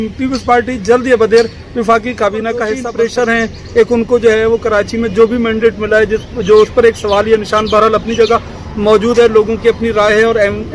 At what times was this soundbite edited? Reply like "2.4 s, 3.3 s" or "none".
2.8 s

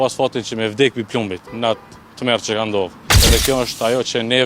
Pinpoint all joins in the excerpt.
3.1 s

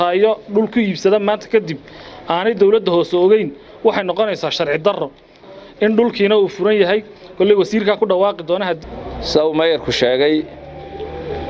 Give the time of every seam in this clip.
5.4 s, 8.8 s

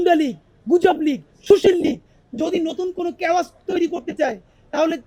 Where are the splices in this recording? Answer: none

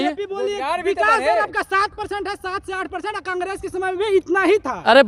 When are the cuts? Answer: none

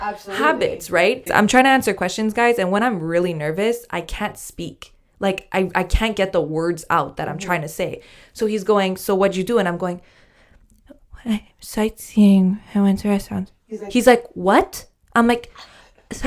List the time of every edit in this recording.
1.3 s

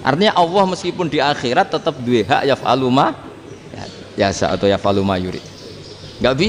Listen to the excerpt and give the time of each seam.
none

